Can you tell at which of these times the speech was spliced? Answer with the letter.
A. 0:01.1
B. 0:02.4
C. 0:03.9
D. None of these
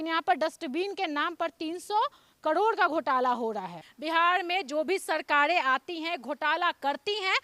C